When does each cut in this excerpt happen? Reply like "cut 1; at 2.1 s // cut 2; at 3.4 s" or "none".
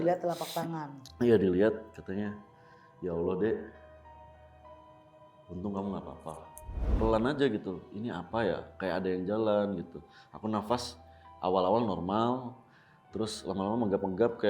cut 1; at 6.8 s